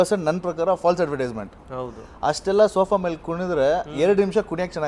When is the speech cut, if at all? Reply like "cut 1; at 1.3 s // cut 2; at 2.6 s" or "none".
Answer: none